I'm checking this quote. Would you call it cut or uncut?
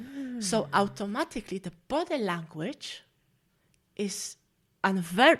uncut